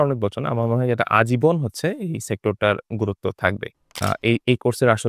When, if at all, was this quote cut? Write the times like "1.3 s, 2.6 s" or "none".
4.0 s